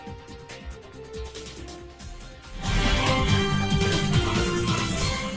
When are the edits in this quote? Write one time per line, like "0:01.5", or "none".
none